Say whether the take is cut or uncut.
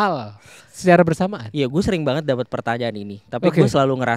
uncut